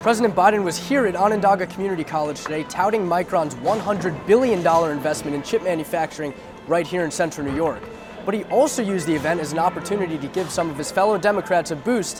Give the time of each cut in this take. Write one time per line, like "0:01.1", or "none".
none